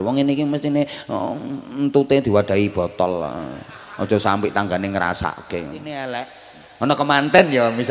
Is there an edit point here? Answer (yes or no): yes